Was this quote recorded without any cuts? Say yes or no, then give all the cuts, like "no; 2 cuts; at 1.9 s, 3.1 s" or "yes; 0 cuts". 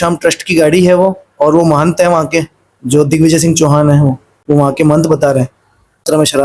yes; 0 cuts